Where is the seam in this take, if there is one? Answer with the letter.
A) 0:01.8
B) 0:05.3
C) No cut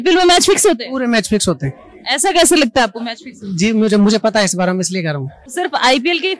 B